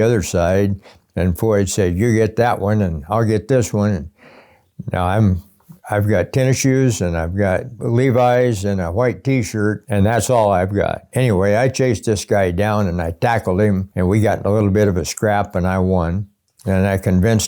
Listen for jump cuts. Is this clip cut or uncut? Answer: cut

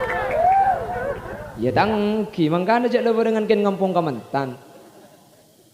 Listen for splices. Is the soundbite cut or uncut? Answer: cut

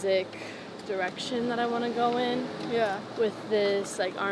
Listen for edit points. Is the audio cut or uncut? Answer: uncut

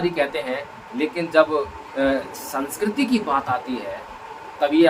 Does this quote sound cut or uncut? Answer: uncut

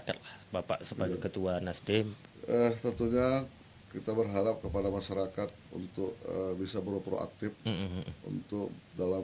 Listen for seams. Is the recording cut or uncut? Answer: cut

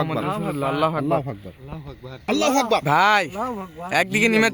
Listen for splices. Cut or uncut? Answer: cut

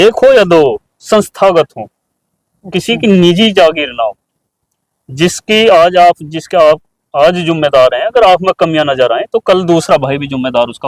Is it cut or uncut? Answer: uncut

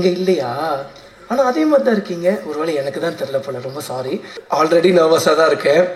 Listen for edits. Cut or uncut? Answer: cut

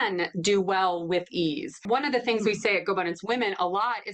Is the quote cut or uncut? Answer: cut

